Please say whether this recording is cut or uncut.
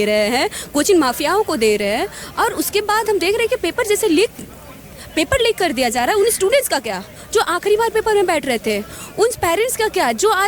uncut